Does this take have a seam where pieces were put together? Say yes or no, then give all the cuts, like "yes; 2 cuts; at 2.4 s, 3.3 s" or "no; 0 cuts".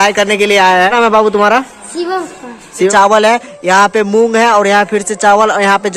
yes; 2 cuts; at 0.9 s, 2.9 s